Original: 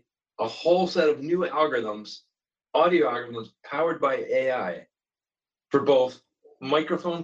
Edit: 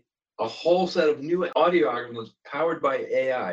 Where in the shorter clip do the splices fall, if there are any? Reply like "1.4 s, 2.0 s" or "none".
1.5 s